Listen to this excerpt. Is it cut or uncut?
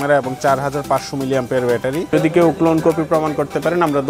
cut